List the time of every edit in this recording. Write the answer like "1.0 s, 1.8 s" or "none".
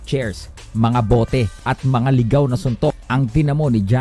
1.6 s, 3.0 s